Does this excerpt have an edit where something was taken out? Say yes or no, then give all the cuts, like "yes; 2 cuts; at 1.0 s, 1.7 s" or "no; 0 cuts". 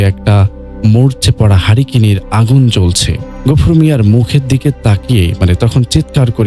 no; 0 cuts